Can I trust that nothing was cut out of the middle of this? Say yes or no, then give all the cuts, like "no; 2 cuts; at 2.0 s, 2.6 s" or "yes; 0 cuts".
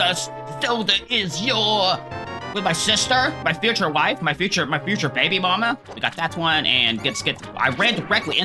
no; 1 cut; at 5.9 s